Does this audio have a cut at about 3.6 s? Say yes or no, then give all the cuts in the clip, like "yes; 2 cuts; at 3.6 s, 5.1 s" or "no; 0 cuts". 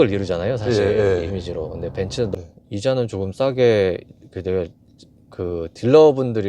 no; 1 cut; at 2.3 s